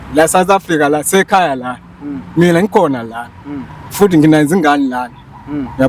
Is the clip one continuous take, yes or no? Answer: yes